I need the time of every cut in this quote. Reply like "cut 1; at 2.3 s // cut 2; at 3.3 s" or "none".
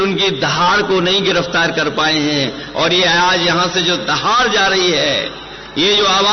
none